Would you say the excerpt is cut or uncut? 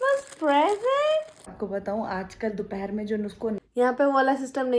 cut